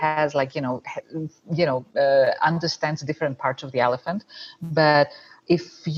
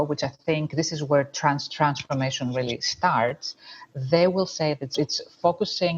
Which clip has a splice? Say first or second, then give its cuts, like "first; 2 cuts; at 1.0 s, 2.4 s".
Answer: second; 1 cut; at 4.9 s